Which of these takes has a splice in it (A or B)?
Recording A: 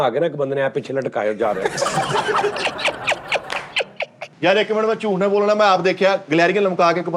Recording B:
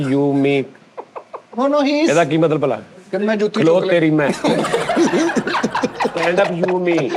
A